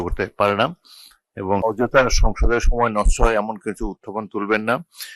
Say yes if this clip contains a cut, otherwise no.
yes